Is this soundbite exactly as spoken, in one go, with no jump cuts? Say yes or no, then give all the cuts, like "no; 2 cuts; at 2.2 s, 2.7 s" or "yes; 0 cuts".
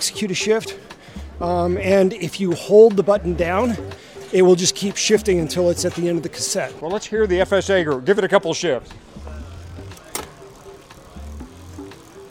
no; 1 cut; at 6.8 s